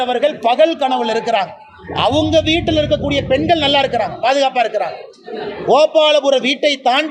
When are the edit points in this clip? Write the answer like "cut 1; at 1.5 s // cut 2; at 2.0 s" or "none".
none